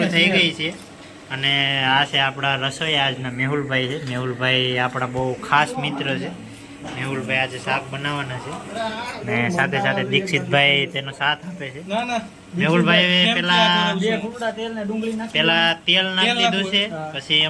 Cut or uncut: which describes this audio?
uncut